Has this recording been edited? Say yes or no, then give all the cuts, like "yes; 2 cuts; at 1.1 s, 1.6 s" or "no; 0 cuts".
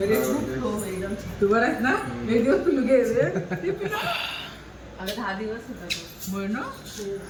no; 0 cuts